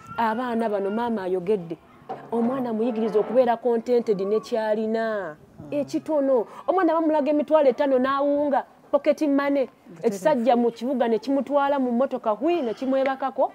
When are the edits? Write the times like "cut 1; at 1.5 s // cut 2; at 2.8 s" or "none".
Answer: none